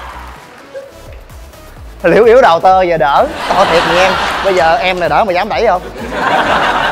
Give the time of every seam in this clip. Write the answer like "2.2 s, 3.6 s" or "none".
6.0 s